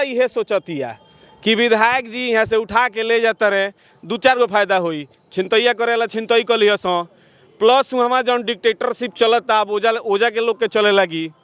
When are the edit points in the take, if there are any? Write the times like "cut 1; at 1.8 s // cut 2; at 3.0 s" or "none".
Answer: none